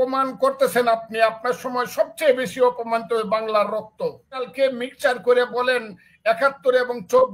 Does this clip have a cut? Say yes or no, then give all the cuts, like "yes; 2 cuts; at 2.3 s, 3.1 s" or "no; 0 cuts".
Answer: yes; 1 cut; at 4.5 s